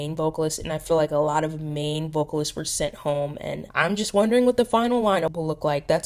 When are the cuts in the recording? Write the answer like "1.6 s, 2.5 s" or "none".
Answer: none

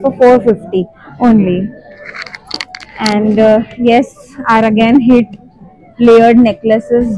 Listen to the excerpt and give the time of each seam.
none

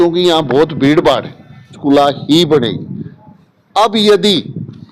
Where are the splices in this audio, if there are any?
1.7 s

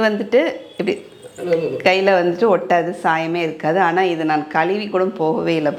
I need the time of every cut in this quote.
none

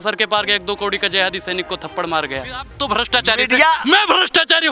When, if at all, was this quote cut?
2.7 s

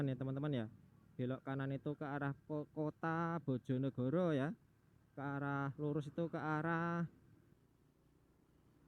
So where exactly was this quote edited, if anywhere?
7.5 s

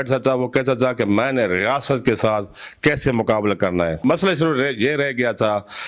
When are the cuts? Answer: 4.0 s

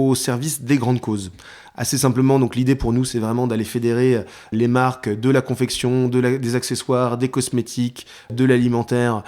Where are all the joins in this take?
4.5 s, 8.3 s

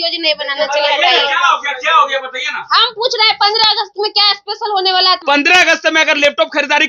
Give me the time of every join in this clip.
5.2 s

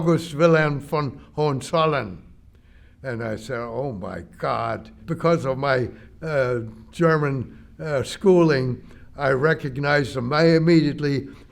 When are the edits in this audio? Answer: 4.9 s

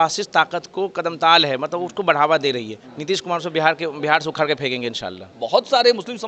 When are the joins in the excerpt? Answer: 2.8 s, 5.3 s

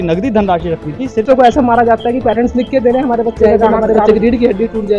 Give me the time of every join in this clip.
1.2 s, 3.8 s

